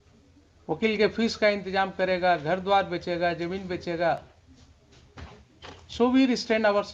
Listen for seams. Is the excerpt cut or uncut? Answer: uncut